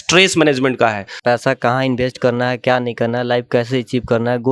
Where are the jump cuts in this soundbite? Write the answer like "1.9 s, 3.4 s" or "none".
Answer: 1.1 s